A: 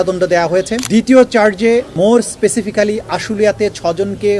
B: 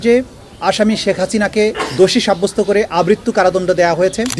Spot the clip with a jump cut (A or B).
A